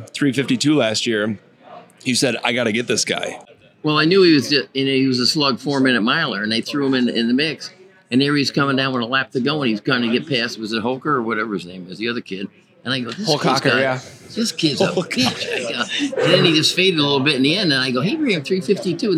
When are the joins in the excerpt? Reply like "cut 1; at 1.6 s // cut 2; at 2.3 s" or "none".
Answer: cut 1; at 3.8 s